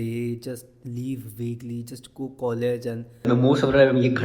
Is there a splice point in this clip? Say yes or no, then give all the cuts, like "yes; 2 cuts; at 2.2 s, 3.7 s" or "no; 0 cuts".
yes; 1 cut; at 3.2 s